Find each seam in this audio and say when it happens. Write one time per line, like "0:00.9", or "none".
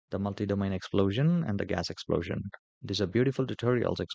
none